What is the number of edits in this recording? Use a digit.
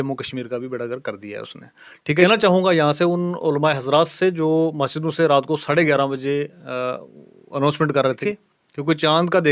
2